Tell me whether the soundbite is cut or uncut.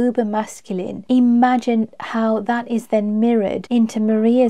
cut